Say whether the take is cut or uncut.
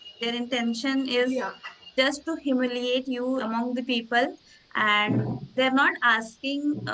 cut